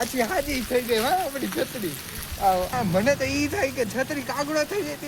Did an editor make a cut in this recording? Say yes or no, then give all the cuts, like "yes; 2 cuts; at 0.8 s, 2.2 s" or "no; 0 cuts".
yes; 1 cut; at 2.7 s